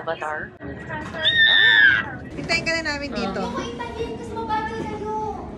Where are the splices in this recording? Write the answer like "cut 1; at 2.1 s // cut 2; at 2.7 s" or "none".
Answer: cut 1; at 2.3 s